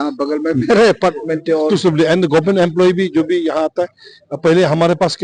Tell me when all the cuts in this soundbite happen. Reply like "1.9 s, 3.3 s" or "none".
1.7 s